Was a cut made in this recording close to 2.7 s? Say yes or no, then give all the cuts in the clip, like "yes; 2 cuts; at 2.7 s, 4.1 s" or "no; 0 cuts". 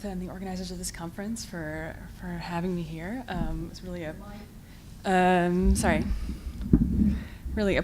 yes; 1 cut; at 2.7 s